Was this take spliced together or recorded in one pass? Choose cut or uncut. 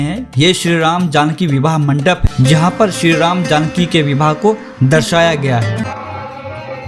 cut